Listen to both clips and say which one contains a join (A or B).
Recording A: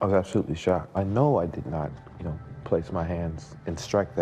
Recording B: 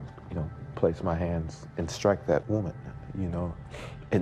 A